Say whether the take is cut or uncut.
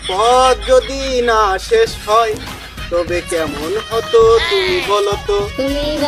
uncut